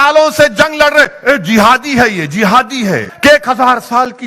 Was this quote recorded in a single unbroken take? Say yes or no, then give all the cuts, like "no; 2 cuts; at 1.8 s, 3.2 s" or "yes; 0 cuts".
no; 1 cut; at 3.1 s